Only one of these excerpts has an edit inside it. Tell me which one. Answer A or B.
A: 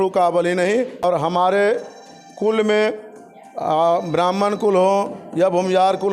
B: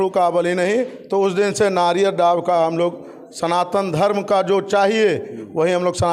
A